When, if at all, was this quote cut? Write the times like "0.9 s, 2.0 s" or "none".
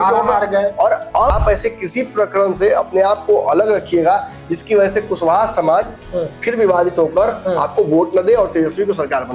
1.3 s